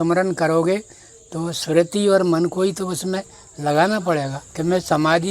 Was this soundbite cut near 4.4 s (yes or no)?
yes